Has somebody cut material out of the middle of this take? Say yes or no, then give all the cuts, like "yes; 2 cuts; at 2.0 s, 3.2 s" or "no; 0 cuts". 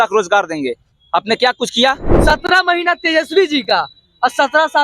yes; 1 cut; at 2.1 s